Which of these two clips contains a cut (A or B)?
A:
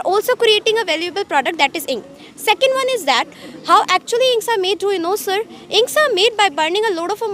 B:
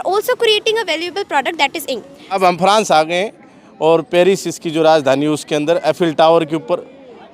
B